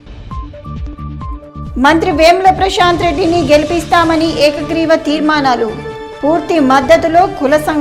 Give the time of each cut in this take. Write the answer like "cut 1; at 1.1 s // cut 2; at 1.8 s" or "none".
cut 1; at 1.6 s